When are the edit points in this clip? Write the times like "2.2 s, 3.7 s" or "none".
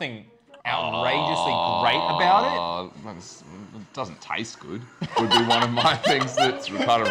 none